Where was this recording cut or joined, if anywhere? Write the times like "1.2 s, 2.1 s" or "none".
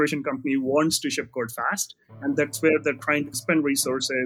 3.3 s